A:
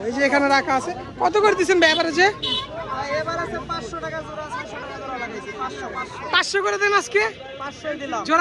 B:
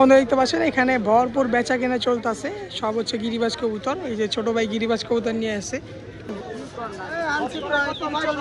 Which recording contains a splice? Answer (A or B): B